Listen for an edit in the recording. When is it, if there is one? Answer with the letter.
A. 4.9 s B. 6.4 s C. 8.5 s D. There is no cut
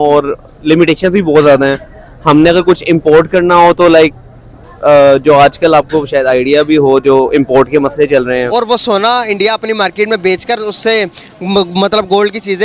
C